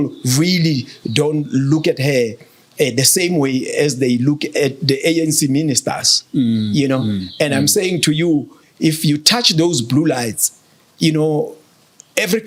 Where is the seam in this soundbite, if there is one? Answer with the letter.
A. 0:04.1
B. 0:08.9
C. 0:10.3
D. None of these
D